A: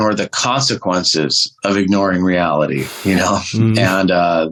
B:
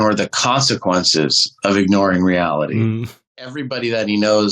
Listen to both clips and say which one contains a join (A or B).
B